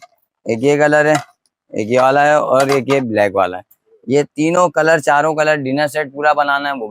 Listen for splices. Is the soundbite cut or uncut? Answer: uncut